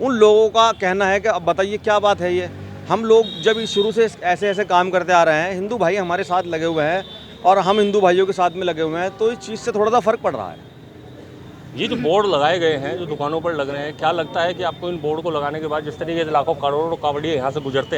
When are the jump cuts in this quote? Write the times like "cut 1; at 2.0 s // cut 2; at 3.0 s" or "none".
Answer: none